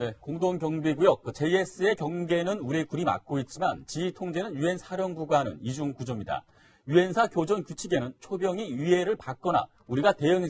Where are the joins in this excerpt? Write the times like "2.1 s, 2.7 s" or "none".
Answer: 9.0 s